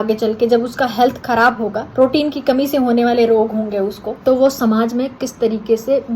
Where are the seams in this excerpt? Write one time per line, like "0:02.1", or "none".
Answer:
0:01.8
0:04.1

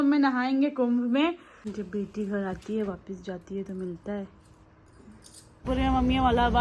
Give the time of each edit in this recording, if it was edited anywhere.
0:01.7
0:05.7

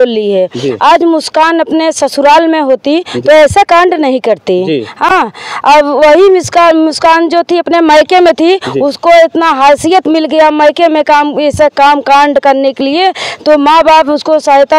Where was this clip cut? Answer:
none

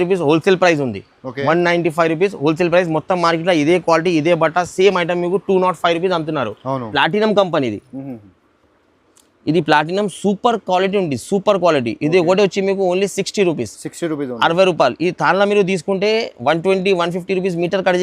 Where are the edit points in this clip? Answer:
0:06.9

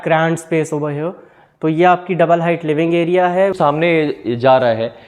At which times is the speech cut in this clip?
0:03.5

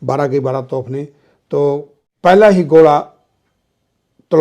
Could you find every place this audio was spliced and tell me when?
0:02.0

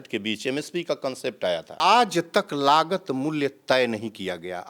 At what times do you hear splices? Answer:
0:01.7

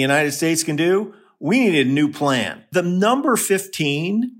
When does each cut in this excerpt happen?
0:02.6

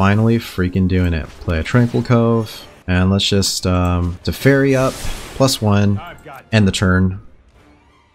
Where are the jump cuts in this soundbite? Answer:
none

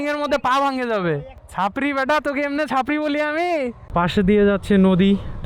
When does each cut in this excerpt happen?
0:03.8

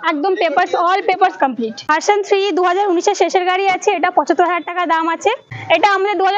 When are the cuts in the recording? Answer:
0:01.8
0:05.4

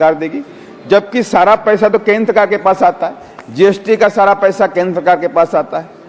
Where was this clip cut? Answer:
none

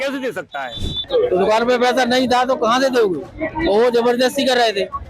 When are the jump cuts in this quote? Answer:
0:01.1

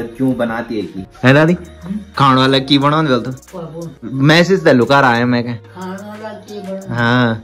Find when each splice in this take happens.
none

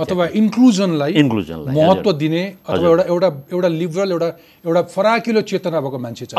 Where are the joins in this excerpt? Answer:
none

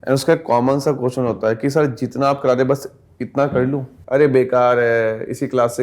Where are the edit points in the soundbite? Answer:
0:03.9

